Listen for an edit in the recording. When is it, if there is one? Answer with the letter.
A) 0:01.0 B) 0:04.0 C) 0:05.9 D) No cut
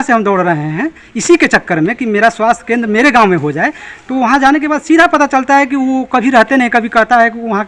D